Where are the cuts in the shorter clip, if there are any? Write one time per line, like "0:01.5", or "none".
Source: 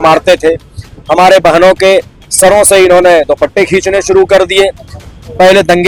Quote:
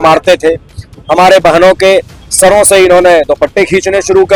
none